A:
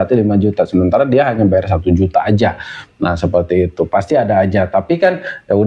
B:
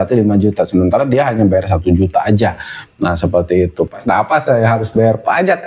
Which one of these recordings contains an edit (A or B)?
B